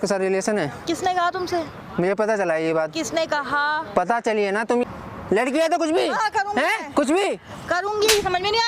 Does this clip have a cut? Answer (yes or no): yes